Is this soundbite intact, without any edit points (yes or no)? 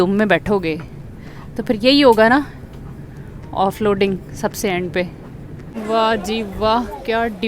no